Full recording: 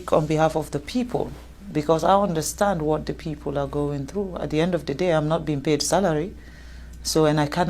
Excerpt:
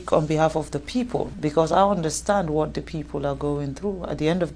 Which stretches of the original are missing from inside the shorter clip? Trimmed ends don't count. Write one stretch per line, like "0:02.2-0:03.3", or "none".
0:01.3-0:01.6